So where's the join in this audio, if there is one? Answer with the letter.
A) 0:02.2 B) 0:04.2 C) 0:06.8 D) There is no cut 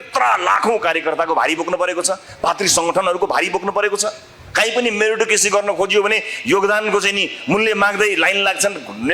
D